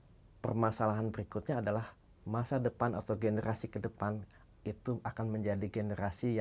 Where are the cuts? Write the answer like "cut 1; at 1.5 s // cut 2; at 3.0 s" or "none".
none